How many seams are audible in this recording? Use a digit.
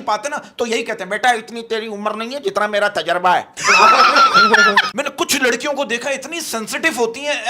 1